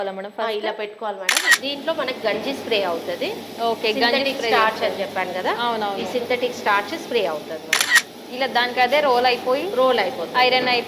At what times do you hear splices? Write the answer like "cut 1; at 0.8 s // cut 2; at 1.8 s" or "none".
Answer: cut 1; at 1.5 s // cut 2; at 7.9 s